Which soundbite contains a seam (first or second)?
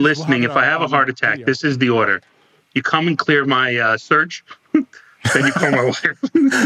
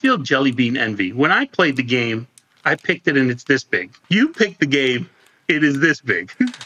second